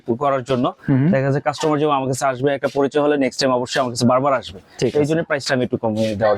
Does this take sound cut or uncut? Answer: uncut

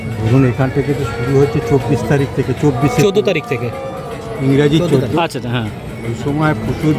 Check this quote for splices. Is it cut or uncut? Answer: uncut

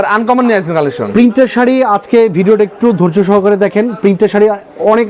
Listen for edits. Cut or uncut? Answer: uncut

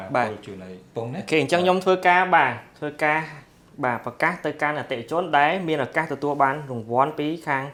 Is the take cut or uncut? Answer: uncut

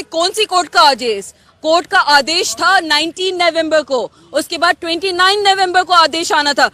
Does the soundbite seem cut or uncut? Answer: uncut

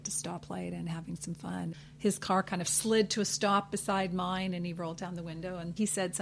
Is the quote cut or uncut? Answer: cut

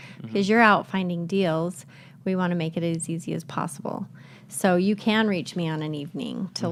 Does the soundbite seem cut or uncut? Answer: uncut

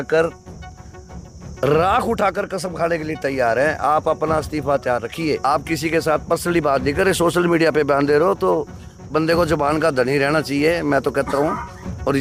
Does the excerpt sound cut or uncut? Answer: uncut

